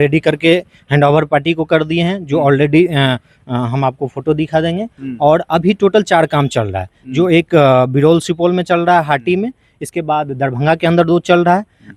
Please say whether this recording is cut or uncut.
uncut